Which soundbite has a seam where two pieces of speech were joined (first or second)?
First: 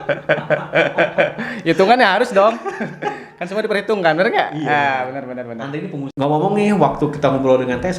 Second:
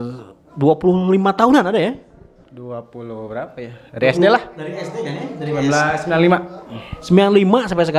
first